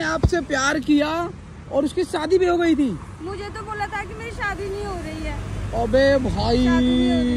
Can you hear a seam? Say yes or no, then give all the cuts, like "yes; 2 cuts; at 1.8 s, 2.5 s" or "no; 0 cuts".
no; 0 cuts